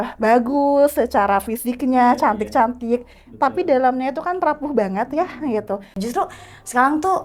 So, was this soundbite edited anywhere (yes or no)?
yes